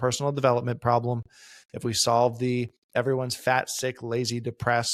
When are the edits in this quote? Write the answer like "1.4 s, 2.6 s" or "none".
none